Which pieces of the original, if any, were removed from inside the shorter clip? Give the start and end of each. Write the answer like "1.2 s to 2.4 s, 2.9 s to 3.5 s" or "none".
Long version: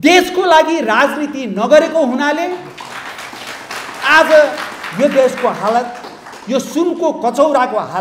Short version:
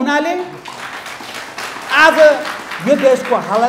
none